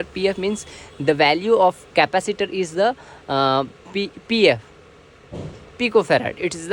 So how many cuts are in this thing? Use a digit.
0